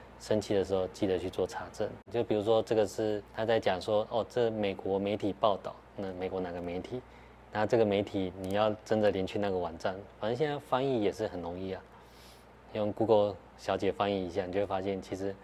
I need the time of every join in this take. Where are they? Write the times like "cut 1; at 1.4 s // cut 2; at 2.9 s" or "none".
cut 1; at 2.0 s // cut 2; at 3.3 s